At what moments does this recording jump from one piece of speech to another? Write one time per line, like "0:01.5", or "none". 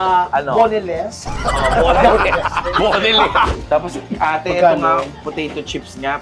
0:03.5